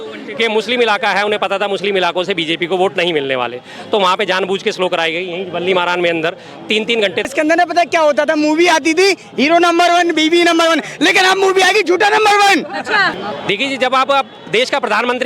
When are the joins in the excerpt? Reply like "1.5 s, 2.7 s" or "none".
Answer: 7.3 s, 13.1 s